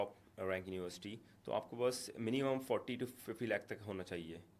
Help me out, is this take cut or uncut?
uncut